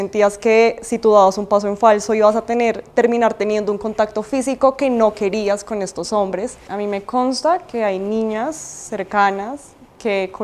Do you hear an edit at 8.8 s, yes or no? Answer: no